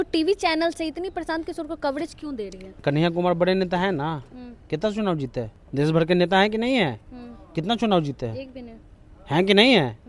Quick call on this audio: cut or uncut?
cut